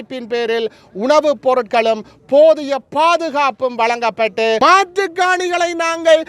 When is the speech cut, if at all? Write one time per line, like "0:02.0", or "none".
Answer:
0:04.6